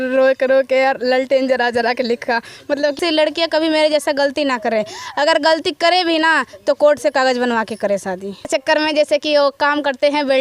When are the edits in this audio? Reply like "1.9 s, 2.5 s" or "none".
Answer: 3.0 s, 8.5 s